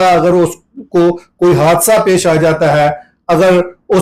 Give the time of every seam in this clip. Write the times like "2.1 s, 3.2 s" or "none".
none